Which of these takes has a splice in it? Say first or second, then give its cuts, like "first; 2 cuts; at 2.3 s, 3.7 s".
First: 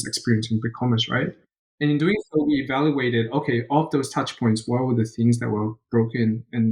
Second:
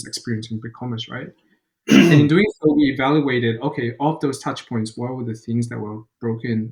first; 1 cut; at 1.8 s